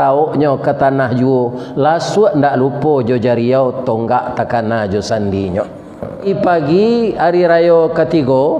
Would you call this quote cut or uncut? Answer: cut